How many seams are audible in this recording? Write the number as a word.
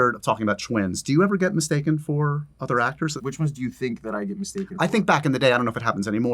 one